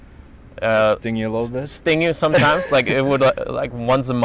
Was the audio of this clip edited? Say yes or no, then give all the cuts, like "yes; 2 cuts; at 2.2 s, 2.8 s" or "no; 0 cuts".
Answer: no; 0 cuts